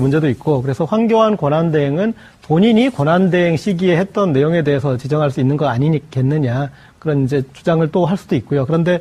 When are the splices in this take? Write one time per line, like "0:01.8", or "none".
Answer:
0:06.6